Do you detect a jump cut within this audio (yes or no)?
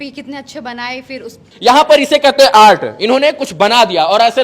yes